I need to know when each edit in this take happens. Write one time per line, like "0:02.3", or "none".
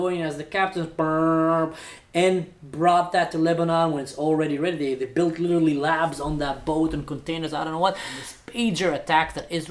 0:08.3